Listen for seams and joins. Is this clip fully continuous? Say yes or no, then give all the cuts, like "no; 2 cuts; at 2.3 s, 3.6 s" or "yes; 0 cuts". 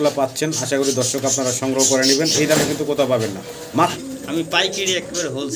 no; 1 cut; at 4.0 s